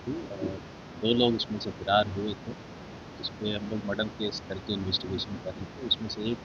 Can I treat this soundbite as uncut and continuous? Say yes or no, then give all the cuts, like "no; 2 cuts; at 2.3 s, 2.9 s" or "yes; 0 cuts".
yes; 0 cuts